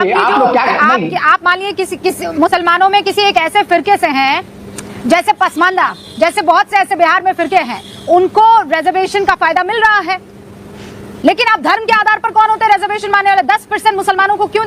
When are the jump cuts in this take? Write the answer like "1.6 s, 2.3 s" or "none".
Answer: none